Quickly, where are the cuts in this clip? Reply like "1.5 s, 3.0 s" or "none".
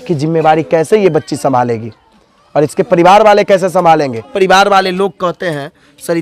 4.3 s